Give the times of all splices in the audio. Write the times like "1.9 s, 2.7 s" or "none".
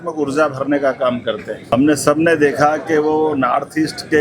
1.7 s